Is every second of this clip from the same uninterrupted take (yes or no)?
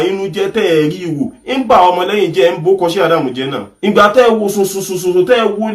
no